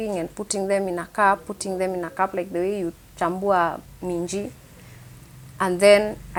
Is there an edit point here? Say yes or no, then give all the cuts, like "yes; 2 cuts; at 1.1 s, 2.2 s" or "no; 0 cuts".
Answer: no; 0 cuts